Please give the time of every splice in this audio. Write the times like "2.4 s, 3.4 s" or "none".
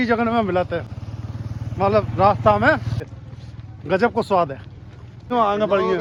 none